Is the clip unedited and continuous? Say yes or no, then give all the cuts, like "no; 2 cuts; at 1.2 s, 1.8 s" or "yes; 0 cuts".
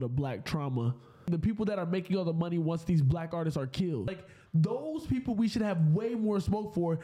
no; 2 cuts; at 1.3 s, 4.3 s